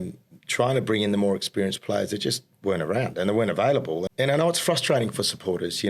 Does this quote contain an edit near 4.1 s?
yes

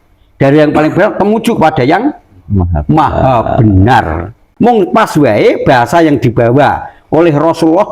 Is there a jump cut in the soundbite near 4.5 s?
yes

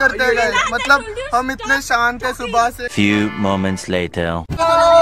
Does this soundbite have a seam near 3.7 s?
no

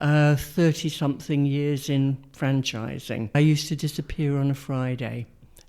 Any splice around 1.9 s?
no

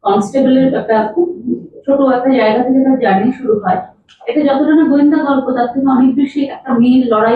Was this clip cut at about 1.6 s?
no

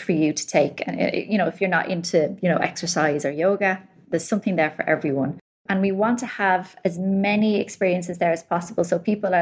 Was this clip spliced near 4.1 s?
yes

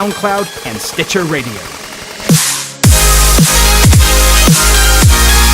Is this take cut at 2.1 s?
yes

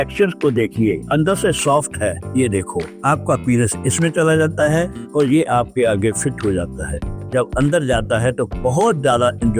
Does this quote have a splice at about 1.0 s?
no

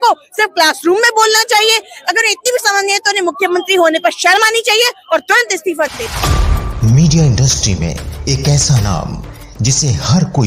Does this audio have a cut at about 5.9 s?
yes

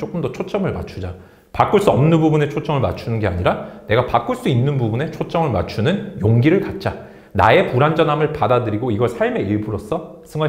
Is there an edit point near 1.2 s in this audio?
no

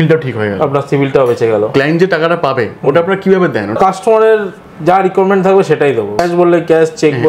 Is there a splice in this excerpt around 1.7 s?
yes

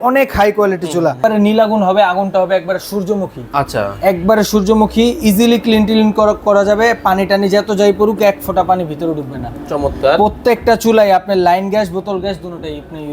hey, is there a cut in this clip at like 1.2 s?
yes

